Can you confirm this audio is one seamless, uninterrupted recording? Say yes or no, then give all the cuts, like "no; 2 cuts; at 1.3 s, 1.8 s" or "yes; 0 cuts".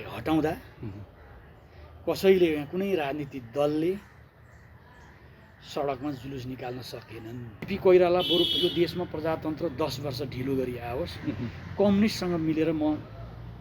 no; 1 cut; at 7.7 s